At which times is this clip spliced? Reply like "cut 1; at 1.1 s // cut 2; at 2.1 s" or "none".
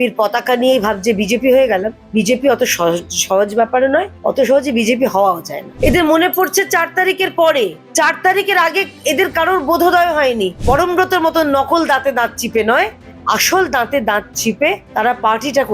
cut 1; at 2.0 s // cut 2; at 4.1 s // cut 3; at 5.6 s // cut 4; at 7.8 s // cut 5; at 10.6 s // cut 6; at 14.8 s